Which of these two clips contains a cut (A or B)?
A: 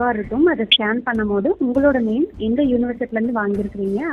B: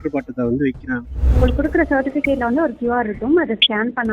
B